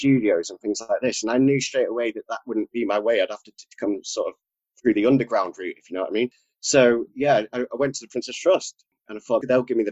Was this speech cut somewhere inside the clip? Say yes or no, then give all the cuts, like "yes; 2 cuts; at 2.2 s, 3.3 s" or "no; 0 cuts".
no; 0 cuts